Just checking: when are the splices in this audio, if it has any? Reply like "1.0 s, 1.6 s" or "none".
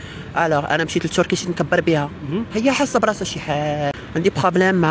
3.9 s